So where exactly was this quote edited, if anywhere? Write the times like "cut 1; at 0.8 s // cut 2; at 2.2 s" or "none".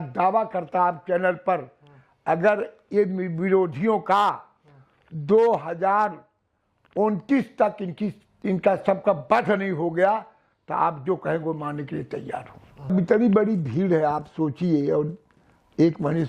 cut 1; at 12.9 s